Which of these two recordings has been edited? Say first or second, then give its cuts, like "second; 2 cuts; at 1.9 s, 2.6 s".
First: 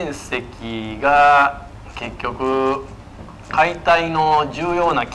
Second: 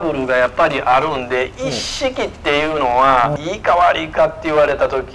second; 1 cut; at 3.4 s